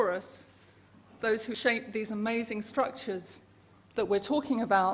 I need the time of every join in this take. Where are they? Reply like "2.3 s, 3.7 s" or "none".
none